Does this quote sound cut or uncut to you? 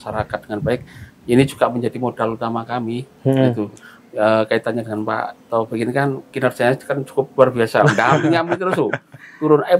uncut